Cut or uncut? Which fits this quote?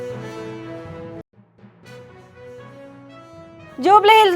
cut